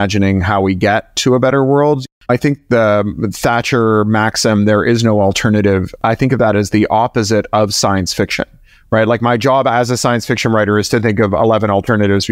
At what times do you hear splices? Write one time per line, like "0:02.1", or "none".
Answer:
0:02.1